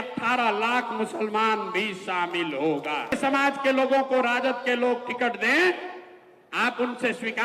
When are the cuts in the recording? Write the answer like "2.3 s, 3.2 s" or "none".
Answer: 3.1 s